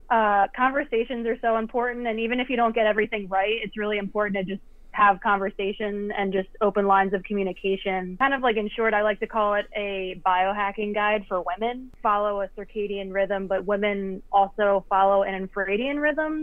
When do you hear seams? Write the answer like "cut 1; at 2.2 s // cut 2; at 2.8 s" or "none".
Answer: cut 1; at 8.1 s // cut 2; at 11.9 s